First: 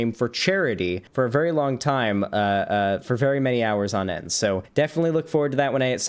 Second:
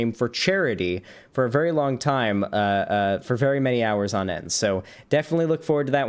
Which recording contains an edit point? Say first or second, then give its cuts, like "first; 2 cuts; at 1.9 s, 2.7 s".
first; 2 cuts; at 1.0 s, 4.7 s